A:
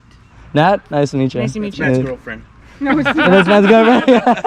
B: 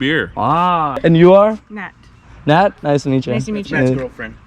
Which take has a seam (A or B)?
B